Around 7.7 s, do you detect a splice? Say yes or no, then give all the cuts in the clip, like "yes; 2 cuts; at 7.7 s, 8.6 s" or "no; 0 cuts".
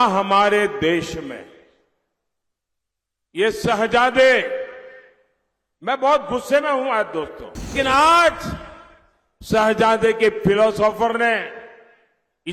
yes; 1 cut; at 7.7 s